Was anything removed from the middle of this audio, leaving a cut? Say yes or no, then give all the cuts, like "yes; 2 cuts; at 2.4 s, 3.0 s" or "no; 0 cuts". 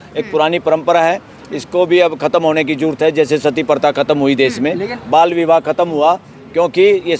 no; 0 cuts